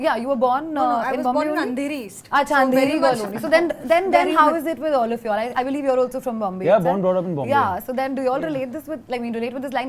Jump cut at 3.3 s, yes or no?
no